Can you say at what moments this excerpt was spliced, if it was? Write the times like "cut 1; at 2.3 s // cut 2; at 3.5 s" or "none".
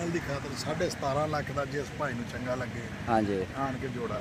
none